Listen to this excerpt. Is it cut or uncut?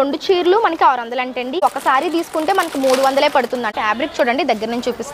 cut